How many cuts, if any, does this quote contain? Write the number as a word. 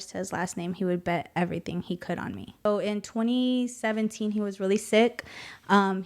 one